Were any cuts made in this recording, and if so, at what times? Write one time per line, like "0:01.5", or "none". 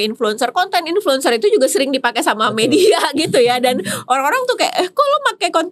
none